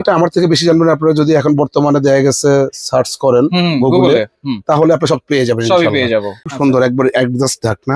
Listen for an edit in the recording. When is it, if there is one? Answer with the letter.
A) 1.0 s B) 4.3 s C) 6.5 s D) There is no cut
C